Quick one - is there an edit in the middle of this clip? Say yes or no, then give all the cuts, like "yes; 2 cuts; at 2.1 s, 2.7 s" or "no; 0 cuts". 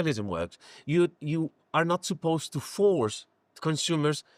no; 0 cuts